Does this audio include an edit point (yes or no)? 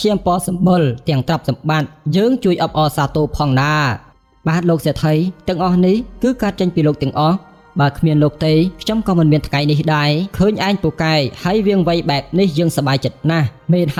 no